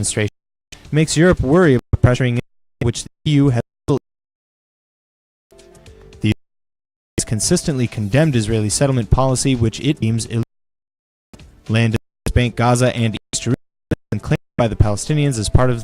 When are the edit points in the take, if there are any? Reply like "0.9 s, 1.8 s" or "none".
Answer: 10.6 s